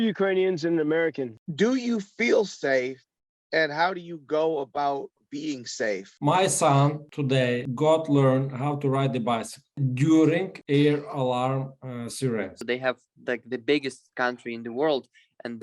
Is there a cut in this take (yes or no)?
yes